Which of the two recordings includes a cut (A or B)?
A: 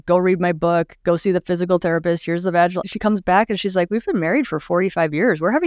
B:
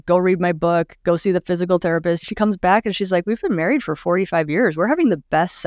B